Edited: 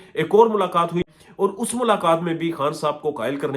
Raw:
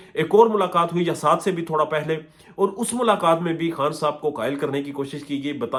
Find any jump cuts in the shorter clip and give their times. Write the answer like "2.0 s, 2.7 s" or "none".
1.0 s